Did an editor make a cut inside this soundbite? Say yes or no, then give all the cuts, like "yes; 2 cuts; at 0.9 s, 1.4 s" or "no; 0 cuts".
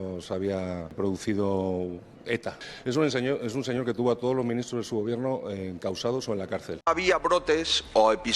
yes; 3 cuts; at 0.8 s, 2.6 s, 6.7 s